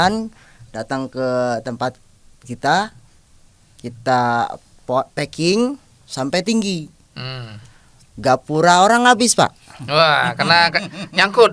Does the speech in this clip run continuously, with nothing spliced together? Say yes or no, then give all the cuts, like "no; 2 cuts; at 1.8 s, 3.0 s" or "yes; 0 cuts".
yes; 0 cuts